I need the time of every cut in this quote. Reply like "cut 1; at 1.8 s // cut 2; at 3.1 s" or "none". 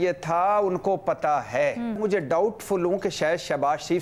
cut 1; at 2.0 s